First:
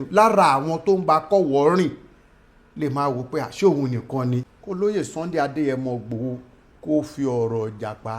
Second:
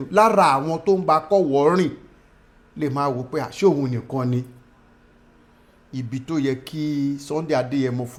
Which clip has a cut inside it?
first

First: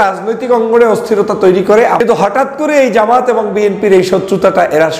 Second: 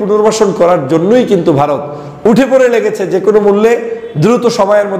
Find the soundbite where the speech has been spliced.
first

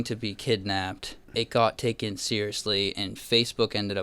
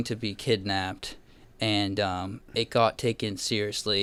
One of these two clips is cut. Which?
first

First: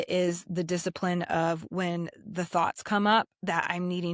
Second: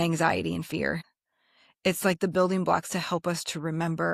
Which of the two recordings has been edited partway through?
second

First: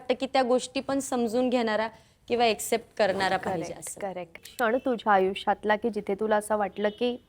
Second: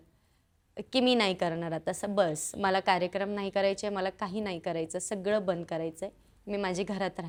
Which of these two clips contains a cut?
first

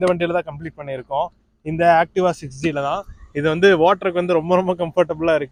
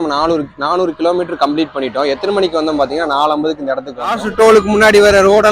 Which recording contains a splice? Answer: second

